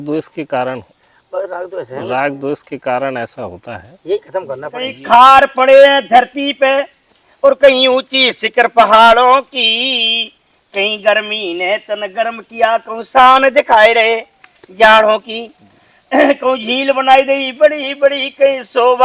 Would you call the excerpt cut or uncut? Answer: cut